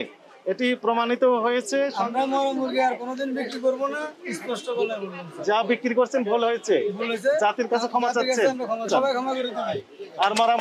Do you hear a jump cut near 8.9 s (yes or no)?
yes